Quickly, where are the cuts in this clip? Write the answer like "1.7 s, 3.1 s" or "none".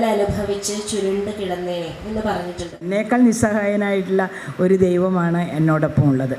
2.9 s